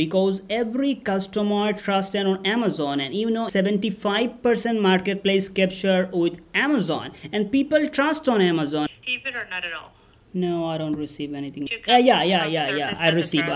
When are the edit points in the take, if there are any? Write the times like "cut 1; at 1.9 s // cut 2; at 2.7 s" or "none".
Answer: cut 1; at 3.5 s // cut 2; at 8.9 s // cut 3; at 11.8 s